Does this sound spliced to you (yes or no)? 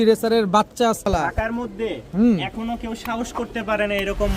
yes